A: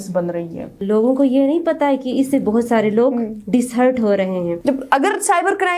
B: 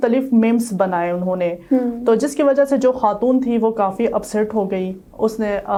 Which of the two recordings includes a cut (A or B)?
A